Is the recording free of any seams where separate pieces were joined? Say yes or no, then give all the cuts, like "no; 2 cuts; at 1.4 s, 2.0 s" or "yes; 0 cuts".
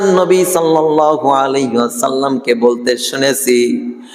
yes; 0 cuts